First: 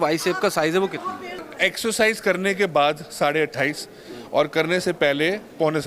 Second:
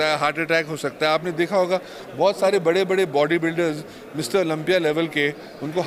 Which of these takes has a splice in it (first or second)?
first